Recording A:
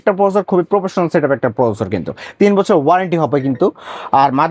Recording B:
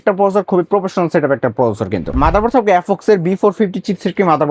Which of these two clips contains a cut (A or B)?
B